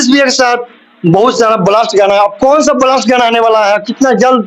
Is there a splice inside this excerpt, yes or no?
no